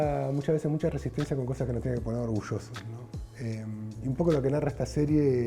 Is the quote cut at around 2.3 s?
no; 0 cuts

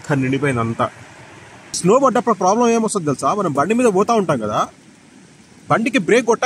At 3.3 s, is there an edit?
no; 1 cut; at 1.8 s

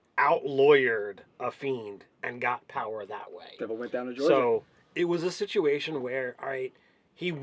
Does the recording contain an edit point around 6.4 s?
no; 1 cut; at 2.7 s

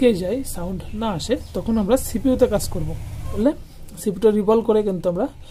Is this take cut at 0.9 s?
no; 1 cut; at 3.4 s

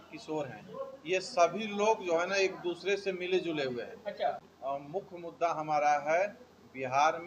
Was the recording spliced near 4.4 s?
yes; 1 cut; at 4.4 s

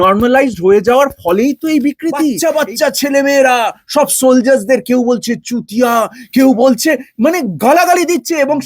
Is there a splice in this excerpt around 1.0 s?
no; 1 cut; at 2.4 s

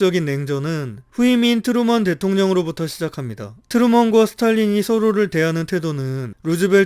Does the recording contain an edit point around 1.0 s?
yes; 1 cut; at 1.0 s

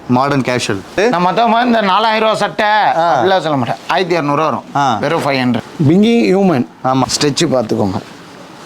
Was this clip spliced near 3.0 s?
no; 3 cuts; at 1.0 s, 5.7 s, 7.0 s

